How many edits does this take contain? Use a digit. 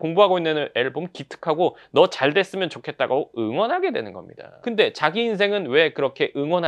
0